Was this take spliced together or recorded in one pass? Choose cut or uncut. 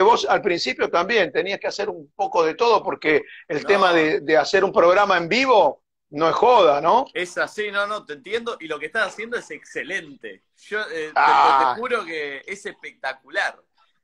cut